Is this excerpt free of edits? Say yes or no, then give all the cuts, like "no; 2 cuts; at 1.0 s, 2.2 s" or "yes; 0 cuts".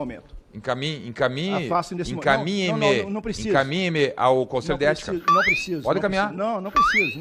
yes; 0 cuts